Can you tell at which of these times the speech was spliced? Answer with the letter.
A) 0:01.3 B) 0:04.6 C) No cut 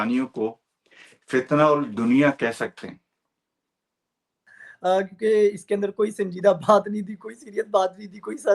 B